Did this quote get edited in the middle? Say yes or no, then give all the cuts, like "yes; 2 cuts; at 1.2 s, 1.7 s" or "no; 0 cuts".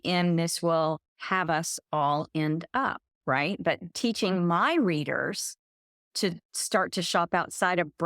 yes; 2 cuts; at 3.9 s, 6.0 s